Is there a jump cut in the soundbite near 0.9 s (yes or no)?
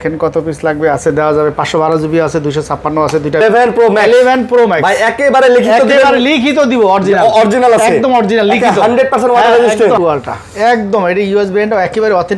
no